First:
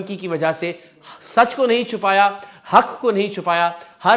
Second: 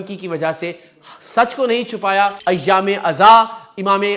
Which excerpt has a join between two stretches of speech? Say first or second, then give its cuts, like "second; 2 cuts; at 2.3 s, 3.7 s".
second; 1 cut; at 2.4 s